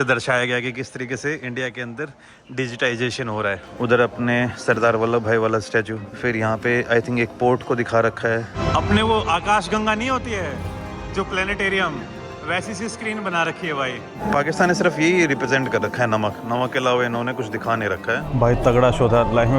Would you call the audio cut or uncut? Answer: cut